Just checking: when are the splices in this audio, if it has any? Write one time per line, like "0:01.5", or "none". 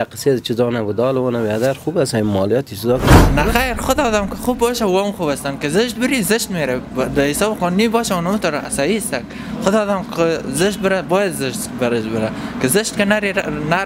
0:03.2